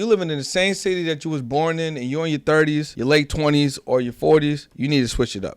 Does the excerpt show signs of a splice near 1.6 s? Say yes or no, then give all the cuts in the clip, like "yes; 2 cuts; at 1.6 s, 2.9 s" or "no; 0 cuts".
no; 2 cuts; at 2.9 s, 4.7 s